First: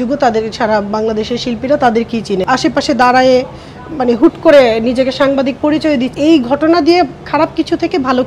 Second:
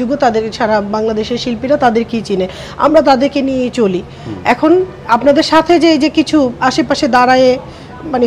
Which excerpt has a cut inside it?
first; 2 cuts; at 2.4 s, 6.1 s

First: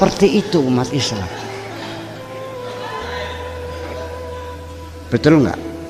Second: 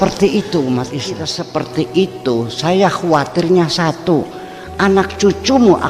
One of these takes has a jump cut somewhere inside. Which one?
second; 1 cut; at 1.4 s

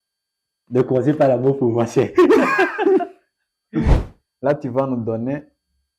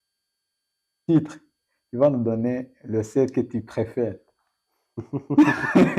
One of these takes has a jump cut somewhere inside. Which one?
first; 1 cut; at 3.9 s

